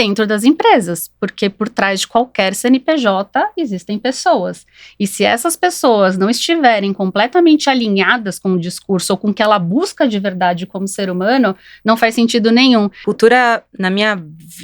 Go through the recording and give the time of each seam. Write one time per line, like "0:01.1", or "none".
0:13.0